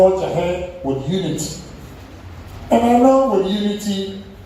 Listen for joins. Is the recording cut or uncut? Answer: uncut